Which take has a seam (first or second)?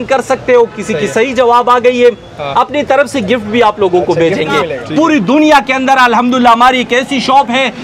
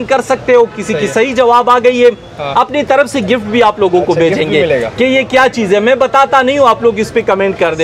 first